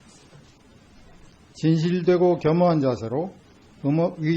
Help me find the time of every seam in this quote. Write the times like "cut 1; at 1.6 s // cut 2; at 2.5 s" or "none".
cut 1; at 2.8 s

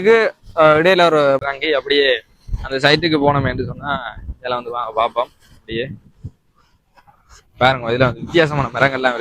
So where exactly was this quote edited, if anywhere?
cut 1; at 1.4 s

